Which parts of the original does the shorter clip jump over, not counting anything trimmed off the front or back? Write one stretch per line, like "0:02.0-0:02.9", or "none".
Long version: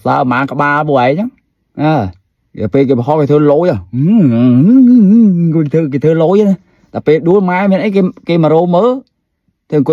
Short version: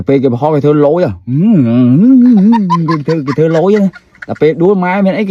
none